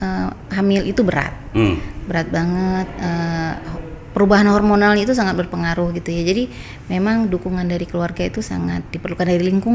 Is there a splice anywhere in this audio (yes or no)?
no